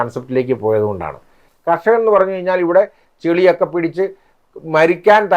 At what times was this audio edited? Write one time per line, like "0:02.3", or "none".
0:01.4